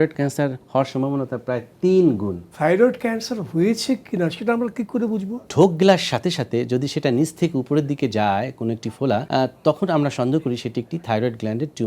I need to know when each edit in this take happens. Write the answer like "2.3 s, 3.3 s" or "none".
2.5 s, 5.5 s, 9.3 s